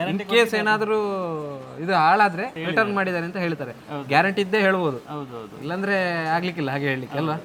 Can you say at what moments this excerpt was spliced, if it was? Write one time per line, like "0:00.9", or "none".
none